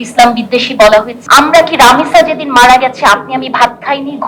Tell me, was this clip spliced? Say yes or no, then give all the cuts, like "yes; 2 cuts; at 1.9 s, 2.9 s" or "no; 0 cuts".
yes; 1 cut; at 1.2 s